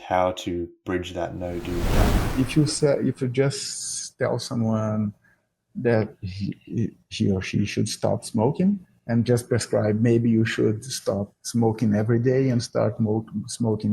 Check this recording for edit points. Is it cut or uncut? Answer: cut